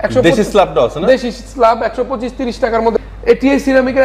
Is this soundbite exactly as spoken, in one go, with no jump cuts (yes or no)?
no